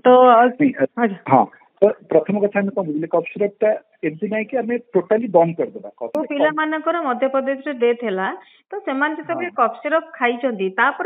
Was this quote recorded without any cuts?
no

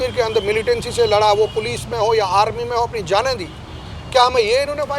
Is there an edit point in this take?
no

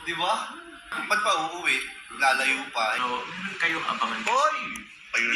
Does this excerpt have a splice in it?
yes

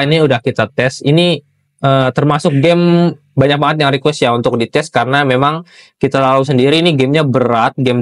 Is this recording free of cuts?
yes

